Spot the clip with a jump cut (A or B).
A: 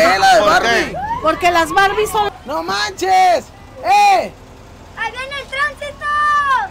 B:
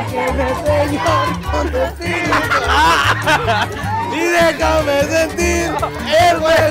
A